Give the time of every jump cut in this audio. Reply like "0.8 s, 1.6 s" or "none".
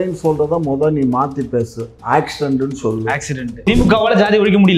3.6 s

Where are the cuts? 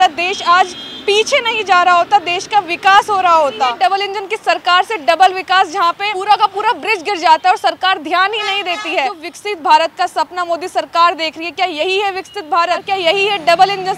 3.7 s, 6.1 s, 9.3 s, 12.8 s

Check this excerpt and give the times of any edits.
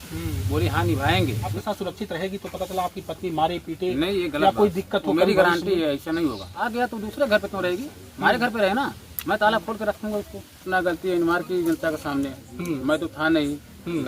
1.6 s, 6.7 s, 10.6 s

